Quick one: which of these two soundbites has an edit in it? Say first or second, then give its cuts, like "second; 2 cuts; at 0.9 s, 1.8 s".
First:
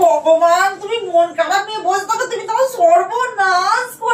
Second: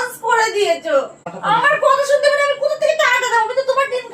second; 1 cut; at 1.3 s